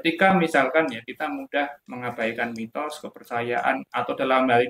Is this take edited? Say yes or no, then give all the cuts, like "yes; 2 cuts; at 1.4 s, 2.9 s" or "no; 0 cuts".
no; 0 cuts